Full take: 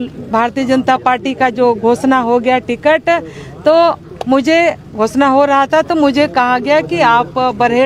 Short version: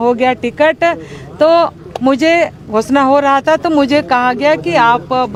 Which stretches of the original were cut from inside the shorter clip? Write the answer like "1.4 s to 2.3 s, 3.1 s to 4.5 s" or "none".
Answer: none